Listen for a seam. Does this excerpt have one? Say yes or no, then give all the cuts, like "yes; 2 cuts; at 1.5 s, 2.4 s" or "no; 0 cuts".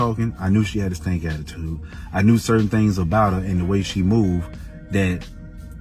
no; 0 cuts